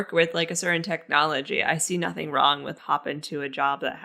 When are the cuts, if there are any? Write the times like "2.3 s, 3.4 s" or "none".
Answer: 2.8 s